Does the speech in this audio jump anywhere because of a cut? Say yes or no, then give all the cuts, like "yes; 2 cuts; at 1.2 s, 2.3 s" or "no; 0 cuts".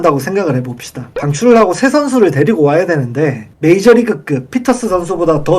yes; 1 cut; at 3.5 s